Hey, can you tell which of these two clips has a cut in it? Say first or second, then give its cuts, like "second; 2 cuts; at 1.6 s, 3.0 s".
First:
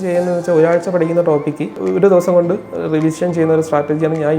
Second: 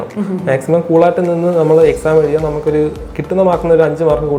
first; 1 cut; at 1.8 s